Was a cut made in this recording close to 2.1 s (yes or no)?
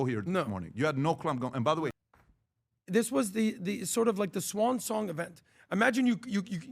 yes